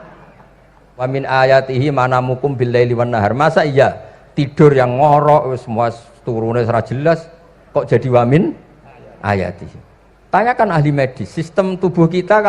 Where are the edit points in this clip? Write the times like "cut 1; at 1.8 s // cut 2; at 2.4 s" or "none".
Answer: cut 1; at 1.1 s